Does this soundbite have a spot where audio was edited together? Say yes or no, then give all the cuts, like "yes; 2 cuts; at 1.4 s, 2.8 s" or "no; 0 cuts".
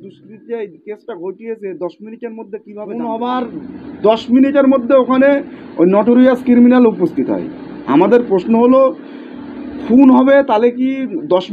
yes; 1 cut; at 2.8 s